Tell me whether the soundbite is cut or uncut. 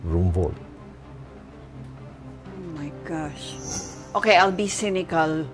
cut